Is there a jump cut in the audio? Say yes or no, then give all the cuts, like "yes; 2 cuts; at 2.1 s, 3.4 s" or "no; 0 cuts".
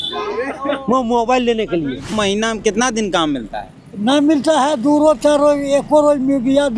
yes; 1 cut; at 2.1 s